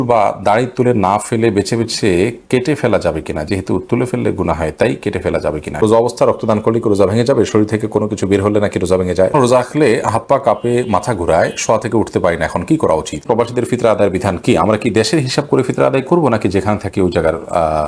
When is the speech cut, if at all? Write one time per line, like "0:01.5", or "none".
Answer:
0:05.8
0:09.3
0:13.2